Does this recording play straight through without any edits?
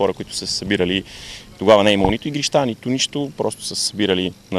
yes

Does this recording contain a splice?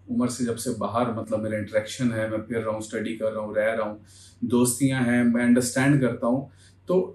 no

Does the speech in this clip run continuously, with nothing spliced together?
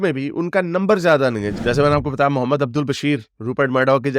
no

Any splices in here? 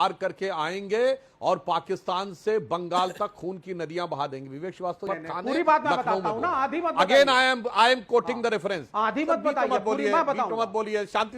yes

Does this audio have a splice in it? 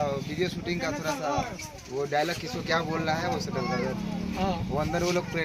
no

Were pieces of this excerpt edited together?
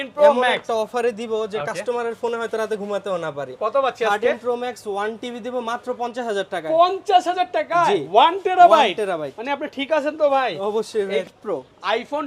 yes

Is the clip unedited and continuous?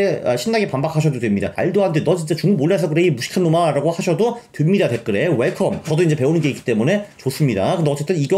no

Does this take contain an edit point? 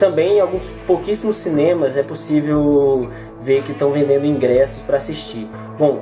yes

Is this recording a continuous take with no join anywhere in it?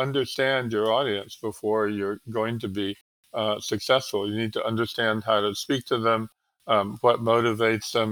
yes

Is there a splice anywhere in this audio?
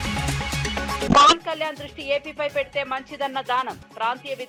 no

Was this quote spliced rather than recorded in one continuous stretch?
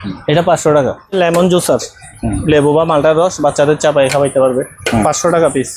yes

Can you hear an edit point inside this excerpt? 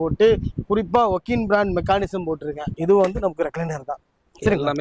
yes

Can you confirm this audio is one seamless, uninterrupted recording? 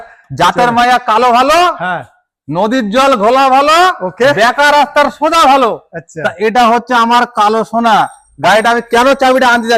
yes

